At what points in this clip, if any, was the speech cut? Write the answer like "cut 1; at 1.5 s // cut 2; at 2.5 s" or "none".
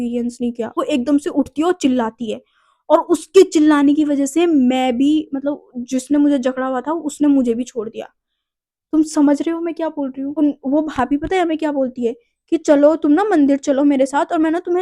cut 1; at 0.8 s // cut 2; at 10.4 s